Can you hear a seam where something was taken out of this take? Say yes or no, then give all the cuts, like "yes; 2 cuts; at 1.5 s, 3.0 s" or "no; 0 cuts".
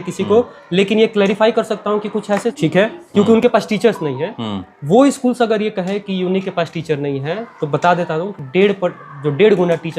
yes; 1 cut; at 2.6 s